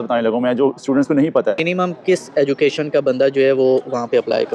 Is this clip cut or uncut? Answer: cut